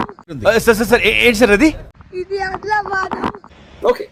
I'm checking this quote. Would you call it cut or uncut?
uncut